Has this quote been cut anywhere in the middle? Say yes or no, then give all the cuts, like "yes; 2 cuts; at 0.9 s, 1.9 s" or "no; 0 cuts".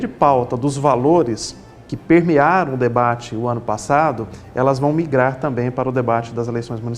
no; 0 cuts